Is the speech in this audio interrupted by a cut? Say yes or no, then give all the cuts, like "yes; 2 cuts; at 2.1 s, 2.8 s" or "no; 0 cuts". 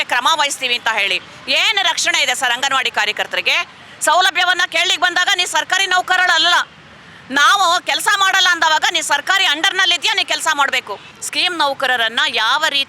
yes; 1 cut; at 11.1 s